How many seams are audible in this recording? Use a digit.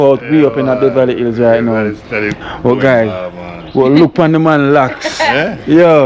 1